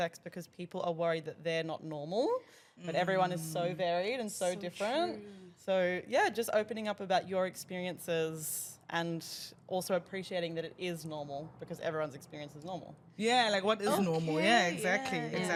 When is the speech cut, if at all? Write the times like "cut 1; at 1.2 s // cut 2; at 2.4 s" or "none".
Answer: none